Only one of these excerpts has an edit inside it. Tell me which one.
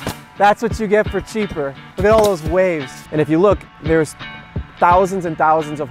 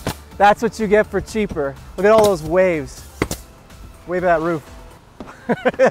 first; 1 cut; at 3.0 s

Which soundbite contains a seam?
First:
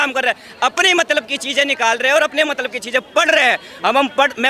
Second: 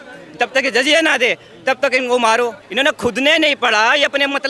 second; 1 cut; at 2.6 s

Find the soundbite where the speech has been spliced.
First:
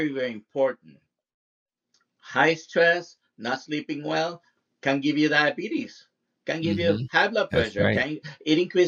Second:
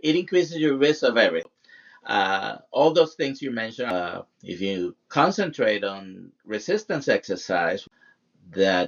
second; 3 cuts; at 1.6 s, 3.9 s, 7.8 s

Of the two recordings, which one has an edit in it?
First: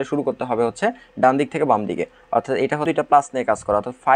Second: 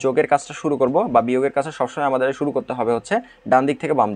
first; 1 cut; at 2.8 s

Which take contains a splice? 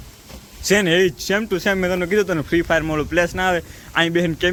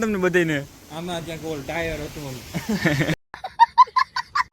second; 1 cut; at 3.2 s

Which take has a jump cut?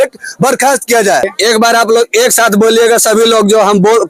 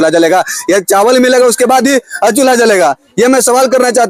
first; 1 cut; at 1.3 s

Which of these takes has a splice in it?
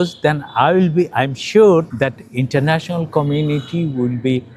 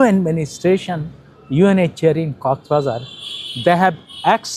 first; 1 cut; at 1.9 s

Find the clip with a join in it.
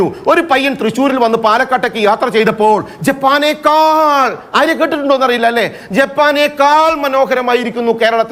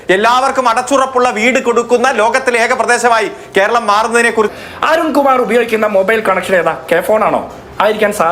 second; 2 cuts; at 4.5 s, 6.8 s

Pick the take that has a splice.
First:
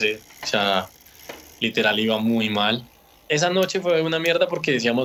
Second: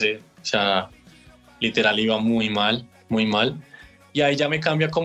first; 1 cut; at 2.9 s

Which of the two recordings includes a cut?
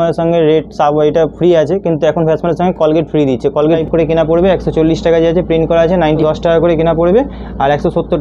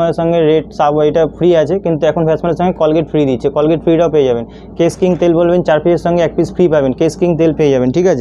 first; 2 cuts; at 3.8 s, 6.2 s

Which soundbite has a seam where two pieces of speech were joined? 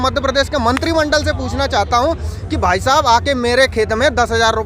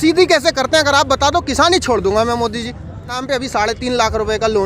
second; 1 cut; at 3.2 s

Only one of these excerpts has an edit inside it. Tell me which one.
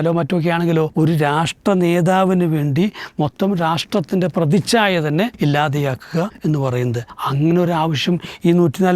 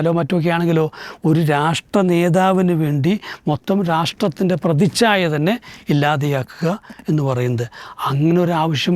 first; 4 cuts; at 0.9 s, 5.3 s, 6.3 s, 7.1 s

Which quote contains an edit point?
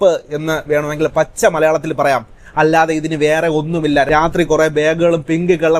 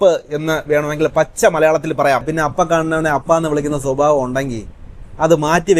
second; 1 cut; at 2.3 s

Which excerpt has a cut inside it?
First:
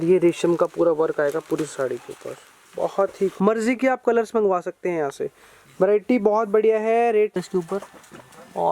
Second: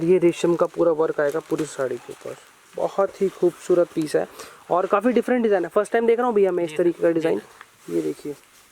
first; 2 cuts; at 3.3 s, 7.4 s

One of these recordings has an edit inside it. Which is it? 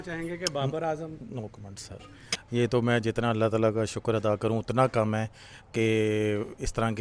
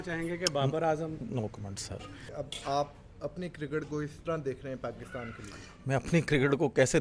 second; 1 cut; at 2.3 s

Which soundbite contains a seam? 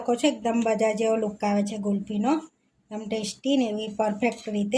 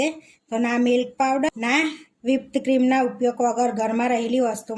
second; 1 cut; at 1.5 s

